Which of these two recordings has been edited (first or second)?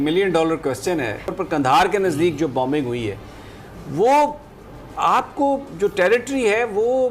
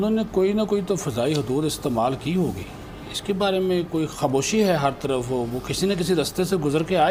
first